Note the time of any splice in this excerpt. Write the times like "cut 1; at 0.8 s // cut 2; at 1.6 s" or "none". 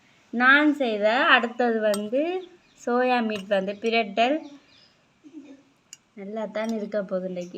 none

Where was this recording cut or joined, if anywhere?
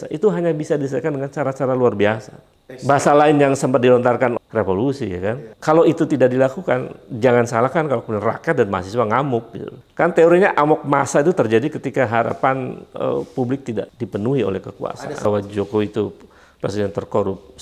cut 1; at 4.3 s // cut 2; at 5.5 s // cut 3; at 9.8 s // cut 4; at 14.0 s // cut 5; at 15.2 s

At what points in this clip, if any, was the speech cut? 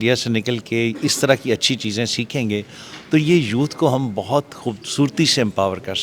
none

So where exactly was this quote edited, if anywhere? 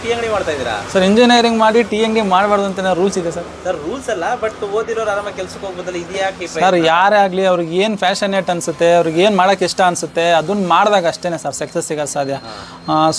none

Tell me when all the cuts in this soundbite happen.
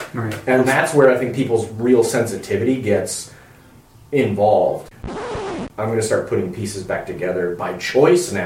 cut 1; at 5.2 s

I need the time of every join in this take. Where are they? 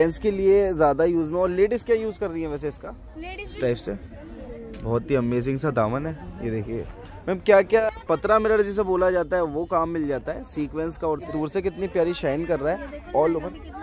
cut 1; at 3.5 s // cut 2; at 7.8 s // cut 3; at 11.3 s

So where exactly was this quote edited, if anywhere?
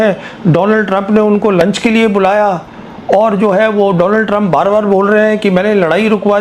none

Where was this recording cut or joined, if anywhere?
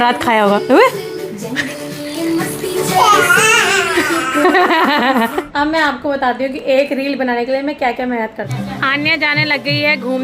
cut 1; at 5.5 s // cut 2; at 8.4 s

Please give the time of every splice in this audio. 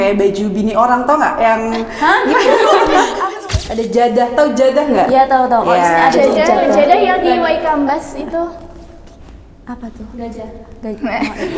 cut 1; at 3.3 s

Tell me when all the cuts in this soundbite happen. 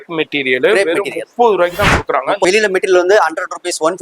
cut 1; at 2.4 s

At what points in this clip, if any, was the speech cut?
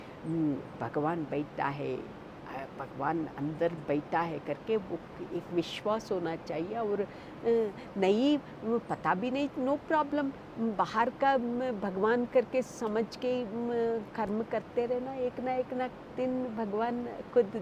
none

